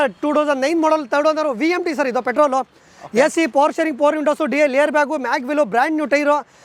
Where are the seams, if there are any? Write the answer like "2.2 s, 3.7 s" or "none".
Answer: none